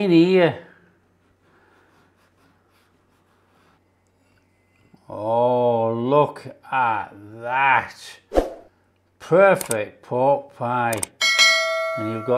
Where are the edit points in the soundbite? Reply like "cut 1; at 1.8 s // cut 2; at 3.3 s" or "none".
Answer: cut 1; at 3.8 s